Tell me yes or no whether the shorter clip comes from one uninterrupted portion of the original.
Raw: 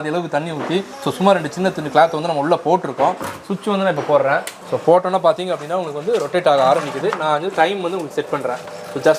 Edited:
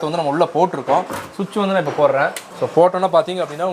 yes